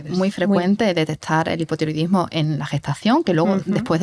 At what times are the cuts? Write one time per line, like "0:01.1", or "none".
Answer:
none